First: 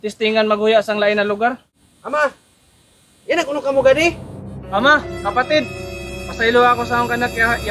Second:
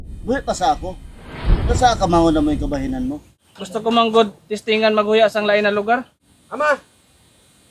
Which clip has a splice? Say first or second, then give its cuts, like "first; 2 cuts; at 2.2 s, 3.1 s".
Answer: first; 1 cut; at 4.6 s